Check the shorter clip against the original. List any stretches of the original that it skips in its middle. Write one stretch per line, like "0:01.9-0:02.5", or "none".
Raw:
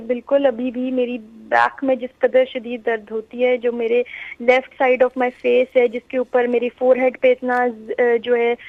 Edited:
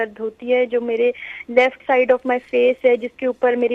none